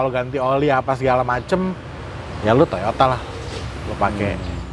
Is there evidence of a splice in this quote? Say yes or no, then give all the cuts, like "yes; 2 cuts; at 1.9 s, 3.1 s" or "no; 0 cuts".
no; 0 cuts